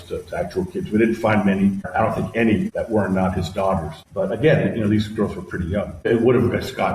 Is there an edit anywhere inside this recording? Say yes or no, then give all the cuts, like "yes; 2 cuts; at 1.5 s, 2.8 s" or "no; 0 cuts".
yes; 4 cuts; at 1.9 s, 2.7 s, 4.0 s, 6.1 s